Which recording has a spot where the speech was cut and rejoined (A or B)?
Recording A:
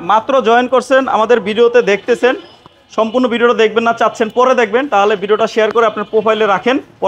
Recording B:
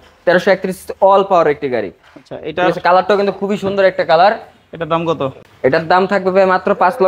B